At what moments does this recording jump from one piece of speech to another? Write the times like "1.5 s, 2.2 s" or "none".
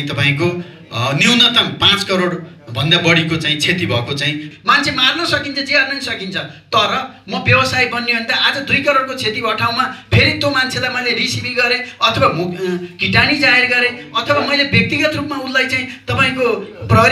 4.5 s